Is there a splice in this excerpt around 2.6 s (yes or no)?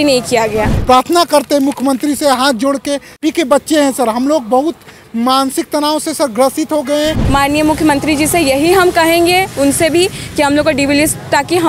no